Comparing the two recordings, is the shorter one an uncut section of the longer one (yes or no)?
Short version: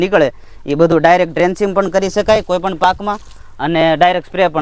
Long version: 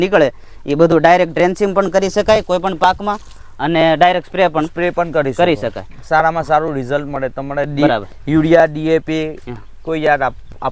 yes